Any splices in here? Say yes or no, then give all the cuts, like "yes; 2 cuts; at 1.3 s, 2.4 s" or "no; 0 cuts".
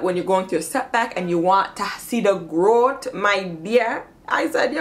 no; 0 cuts